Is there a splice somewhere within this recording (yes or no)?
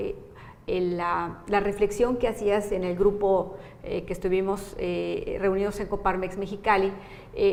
no